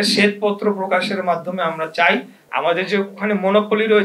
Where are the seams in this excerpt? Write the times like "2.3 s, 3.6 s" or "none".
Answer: 2.4 s